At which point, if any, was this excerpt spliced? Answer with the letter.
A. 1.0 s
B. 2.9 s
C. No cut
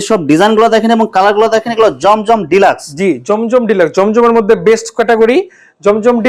C